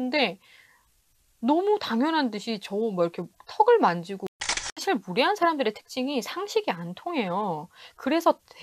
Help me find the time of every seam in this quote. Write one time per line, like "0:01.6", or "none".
0:04.4